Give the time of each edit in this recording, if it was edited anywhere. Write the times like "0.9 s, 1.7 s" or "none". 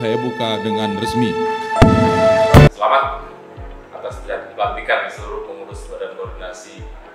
2.7 s